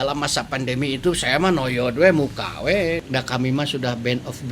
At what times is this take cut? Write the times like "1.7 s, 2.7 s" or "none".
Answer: 3.0 s

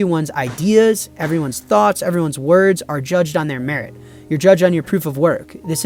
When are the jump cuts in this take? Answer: none

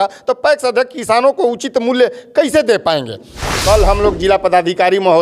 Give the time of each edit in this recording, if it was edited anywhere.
3.5 s

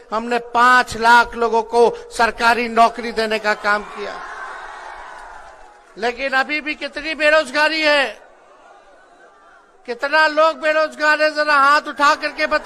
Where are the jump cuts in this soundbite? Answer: none

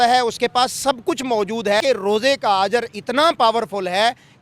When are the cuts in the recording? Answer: 1.8 s

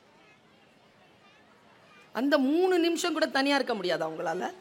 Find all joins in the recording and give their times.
none

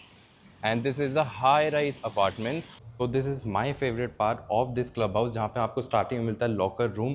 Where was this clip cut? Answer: 2.8 s

